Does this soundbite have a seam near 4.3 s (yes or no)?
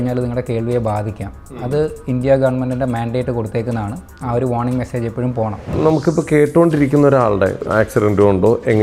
no